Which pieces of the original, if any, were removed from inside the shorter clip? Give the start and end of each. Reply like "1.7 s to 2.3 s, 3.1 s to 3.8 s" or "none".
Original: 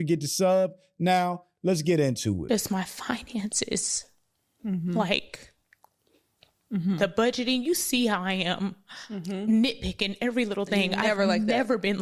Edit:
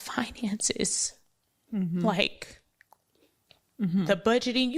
none